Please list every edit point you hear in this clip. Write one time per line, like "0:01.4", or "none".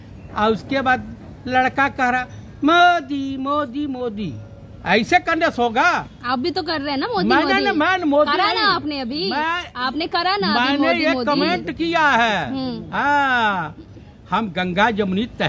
none